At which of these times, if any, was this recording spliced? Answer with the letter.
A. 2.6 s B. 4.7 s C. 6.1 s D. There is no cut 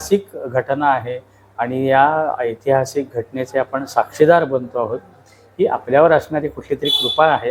D